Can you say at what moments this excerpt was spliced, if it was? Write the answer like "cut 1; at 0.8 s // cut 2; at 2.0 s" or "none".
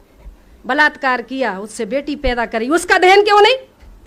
none